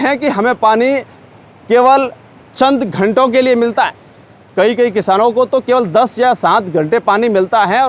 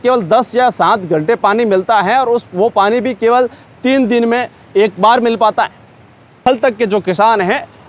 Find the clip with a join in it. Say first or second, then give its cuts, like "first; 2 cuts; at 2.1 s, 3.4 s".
second; 1 cut; at 6.4 s